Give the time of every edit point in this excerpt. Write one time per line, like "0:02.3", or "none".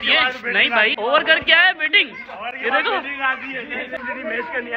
0:00.9
0:03.9